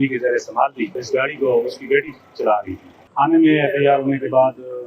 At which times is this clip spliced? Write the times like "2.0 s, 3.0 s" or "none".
1.0 s, 3.0 s